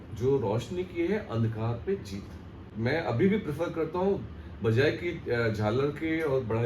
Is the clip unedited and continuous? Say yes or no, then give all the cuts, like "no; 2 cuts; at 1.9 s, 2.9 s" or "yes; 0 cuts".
no; 1 cut; at 2.7 s